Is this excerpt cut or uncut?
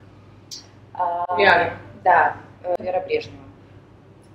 cut